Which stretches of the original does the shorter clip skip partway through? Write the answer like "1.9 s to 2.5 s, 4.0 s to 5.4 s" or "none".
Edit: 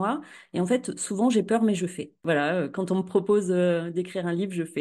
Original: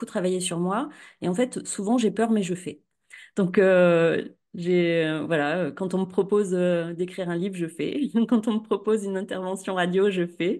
2.9 s to 5.2 s